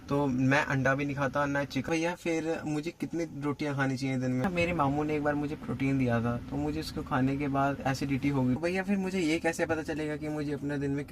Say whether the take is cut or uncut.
cut